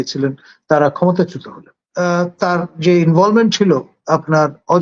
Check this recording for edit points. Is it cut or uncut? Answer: cut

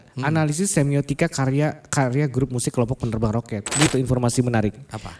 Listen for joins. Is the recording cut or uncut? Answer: cut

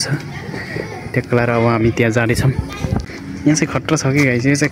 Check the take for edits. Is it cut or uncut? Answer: cut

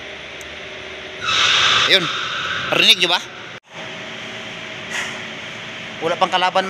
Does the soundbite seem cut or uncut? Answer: cut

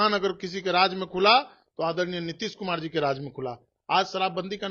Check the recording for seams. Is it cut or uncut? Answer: uncut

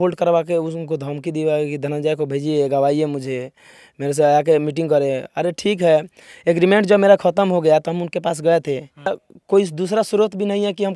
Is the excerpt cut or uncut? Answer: cut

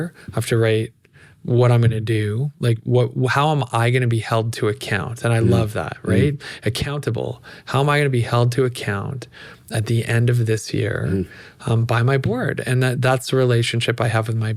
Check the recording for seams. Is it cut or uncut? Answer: uncut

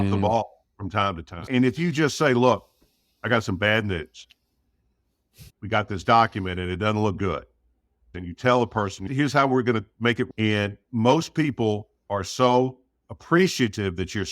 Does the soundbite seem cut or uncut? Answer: cut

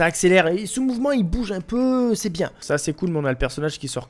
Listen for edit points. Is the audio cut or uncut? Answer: cut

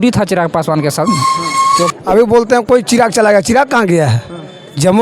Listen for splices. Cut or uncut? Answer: cut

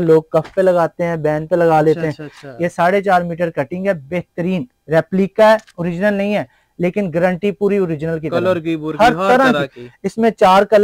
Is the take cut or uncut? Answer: uncut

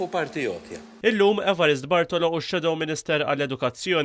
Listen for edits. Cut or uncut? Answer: cut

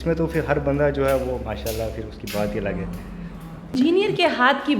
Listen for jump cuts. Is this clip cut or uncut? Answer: cut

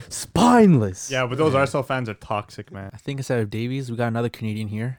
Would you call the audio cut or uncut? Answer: cut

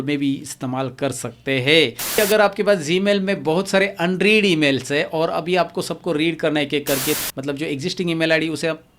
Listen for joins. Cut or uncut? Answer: cut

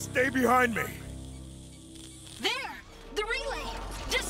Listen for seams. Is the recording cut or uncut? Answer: cut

